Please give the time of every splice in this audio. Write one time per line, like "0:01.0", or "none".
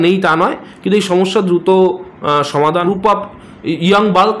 0:02.8